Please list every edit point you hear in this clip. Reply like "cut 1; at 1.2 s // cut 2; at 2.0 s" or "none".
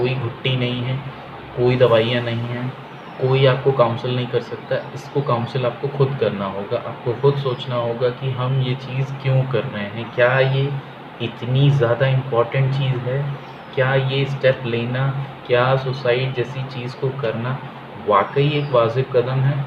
none